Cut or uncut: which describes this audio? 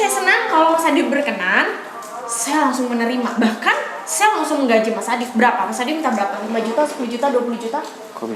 uncut